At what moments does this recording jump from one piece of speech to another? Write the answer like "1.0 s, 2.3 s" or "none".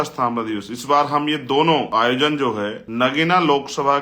1.9 s, 2.8 s